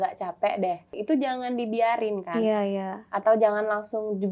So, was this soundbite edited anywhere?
yes; 1 cut; at 0.9 s

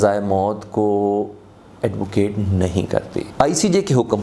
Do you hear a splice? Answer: yes; 1 cut; at 3.2 s

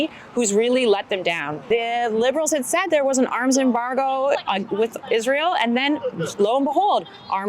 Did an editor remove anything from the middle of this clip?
yes; 1 cut; at 1.5 s

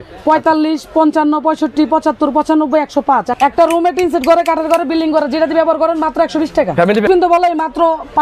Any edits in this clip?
yes; 2 cuts; at 3.3 s, 7.0 s

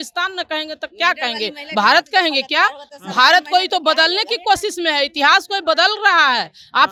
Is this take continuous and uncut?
yes; 0 cuts

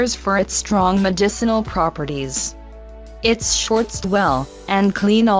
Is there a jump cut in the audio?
no; 0 cuts

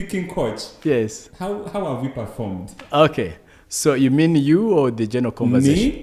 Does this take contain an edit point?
no; 0 cuts

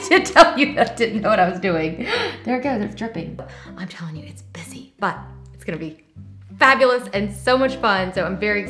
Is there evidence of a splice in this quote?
yes; 1 cut; at 3.4 s

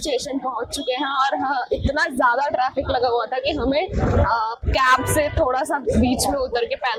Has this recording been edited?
no; 0 cuts

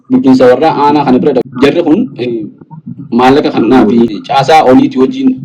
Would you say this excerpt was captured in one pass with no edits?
no; 2 cuts; at 1.5 s, 4.2 s

